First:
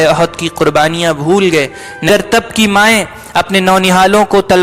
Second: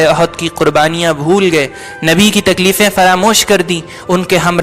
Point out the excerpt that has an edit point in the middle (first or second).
first